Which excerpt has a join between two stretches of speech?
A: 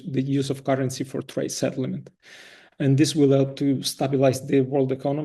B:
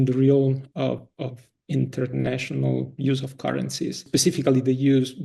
B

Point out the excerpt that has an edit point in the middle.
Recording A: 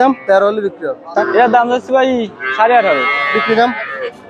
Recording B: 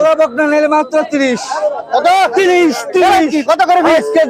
A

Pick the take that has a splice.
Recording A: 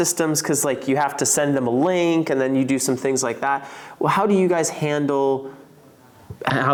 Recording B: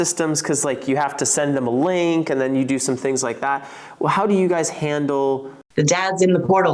B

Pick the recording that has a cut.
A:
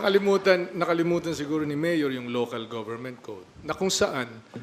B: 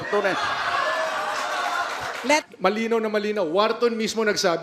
B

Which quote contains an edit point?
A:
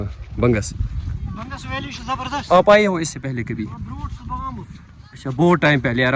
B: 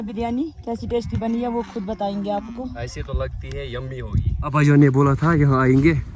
B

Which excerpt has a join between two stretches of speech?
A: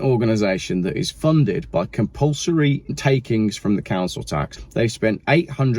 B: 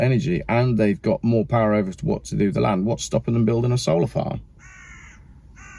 A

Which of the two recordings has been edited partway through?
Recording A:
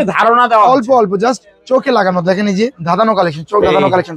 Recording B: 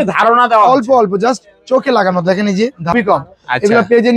B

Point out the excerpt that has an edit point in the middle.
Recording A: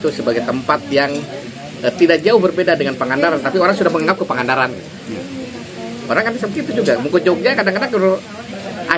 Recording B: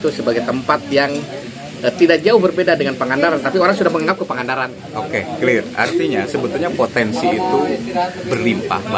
B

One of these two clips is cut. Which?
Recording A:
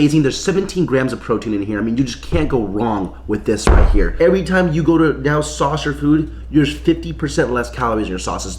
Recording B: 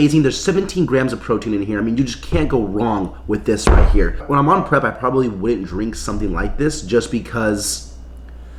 A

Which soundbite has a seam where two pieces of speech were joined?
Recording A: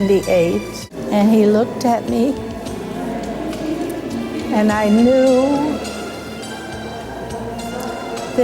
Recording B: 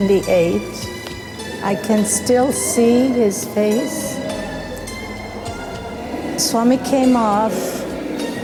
A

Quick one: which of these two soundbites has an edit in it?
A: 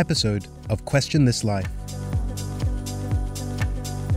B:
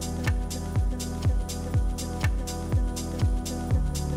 A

